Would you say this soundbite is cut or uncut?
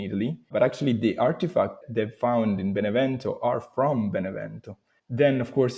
cut